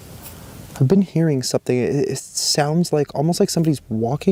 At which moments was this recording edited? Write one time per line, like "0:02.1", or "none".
none